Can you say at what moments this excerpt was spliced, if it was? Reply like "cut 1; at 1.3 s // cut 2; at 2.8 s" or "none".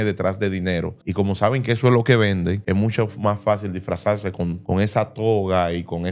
cut 1; at 1.0 s // cut 2; at 2.6 s // cut 3; at 4.6 s